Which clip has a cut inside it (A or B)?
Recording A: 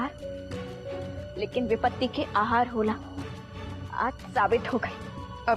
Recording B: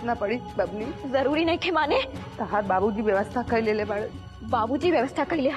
B